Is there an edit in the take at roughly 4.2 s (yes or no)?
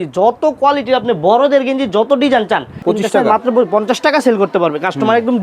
no